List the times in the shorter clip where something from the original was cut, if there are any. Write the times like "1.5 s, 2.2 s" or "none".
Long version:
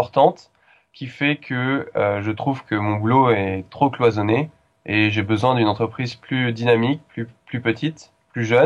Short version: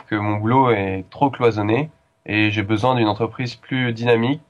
none